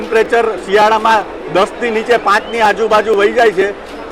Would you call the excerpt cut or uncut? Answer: uncut